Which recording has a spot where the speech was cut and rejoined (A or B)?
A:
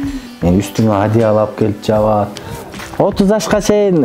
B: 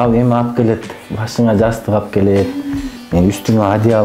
A